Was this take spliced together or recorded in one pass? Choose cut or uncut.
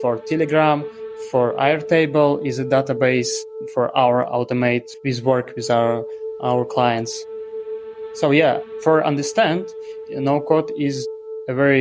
cut